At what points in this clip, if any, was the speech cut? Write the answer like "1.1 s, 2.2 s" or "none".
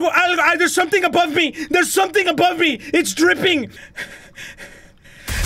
3.8 s